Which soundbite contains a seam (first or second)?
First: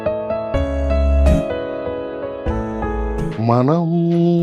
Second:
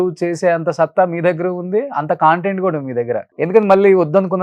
second